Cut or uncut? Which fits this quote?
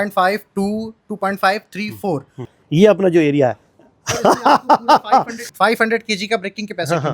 cut